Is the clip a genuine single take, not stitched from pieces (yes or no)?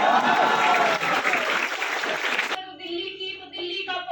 no